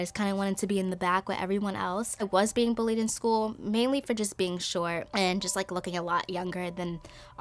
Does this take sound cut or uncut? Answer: cut